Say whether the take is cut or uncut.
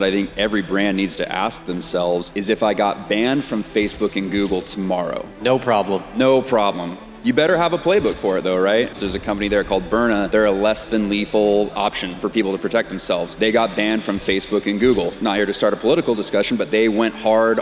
cut